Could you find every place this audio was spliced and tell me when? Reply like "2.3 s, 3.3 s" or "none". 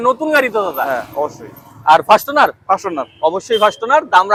none